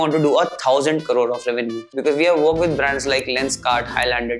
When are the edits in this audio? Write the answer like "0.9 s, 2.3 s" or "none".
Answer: 1.9 s

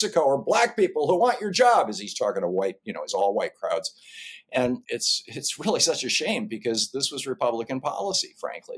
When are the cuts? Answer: 4.8 s

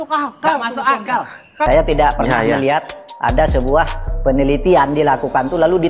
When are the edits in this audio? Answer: 1.7 s

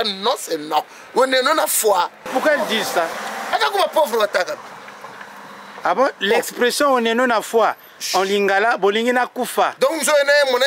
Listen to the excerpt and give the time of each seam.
2.2 s, 3.2 s

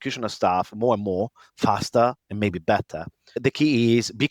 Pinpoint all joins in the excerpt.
3.4 s

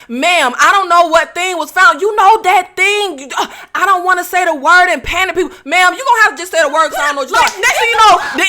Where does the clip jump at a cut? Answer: 7.5 s

